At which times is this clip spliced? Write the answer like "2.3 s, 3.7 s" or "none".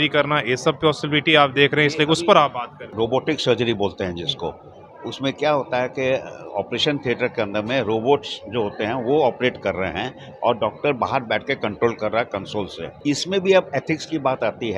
2.9 s, 12.8 s